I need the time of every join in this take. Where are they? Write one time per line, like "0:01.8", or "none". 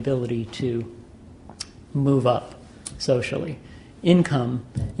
0:03.2